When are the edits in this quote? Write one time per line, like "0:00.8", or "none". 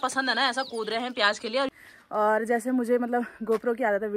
0:01.7